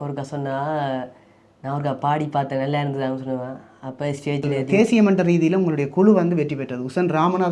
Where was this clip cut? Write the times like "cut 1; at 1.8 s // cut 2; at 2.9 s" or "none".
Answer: cut 1; at 4.6 s